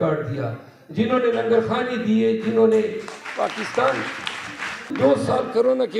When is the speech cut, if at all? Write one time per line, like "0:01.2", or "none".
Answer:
0:04.9